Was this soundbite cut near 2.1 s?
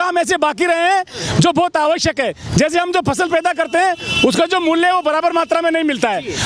no; 0 cuts

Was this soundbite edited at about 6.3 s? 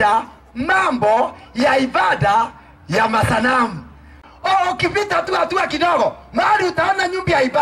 no; 1 cut; at 4.2 s

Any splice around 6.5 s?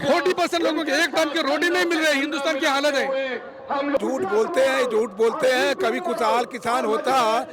no; 1 cut; at 4.0 s

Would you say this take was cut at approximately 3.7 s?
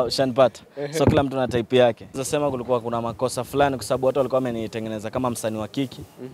no; 1 cut; at 2.2 s

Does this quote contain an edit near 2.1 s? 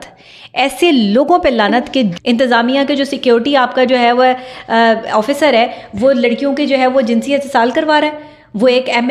yes; 1 cut; at 2.1 s

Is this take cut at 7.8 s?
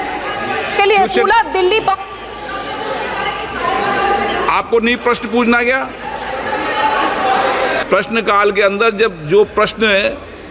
yes; 1 cut; at 7.8 s

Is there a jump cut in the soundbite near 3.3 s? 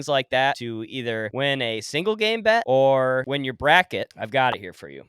yes; 4 cuts; at 0.8 s, 2.6 s, 3.3 s, 4.1 s

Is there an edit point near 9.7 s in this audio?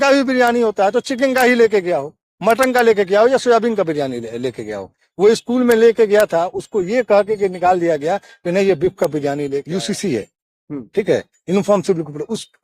yes; 1 cut; at 9.7 s

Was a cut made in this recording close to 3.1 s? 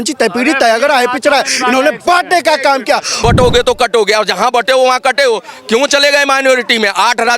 yes; 1 cut; at 3.1 s

